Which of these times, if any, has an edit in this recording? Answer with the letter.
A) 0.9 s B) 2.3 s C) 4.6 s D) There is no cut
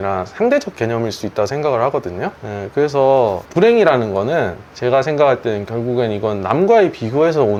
D